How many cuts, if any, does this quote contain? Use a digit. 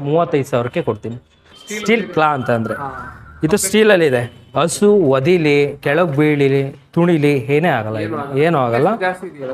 1